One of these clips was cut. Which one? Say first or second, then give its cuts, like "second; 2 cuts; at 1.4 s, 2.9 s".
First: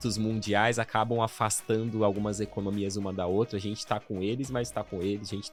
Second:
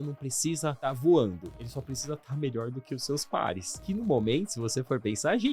second; 3 cuts; at 0.8 s, 1.6 s, 3.7 s